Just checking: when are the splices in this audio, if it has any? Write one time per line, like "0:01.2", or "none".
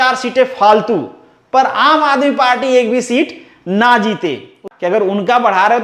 0:04.6